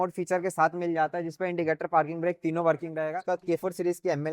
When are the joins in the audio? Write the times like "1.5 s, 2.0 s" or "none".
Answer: 3.0 s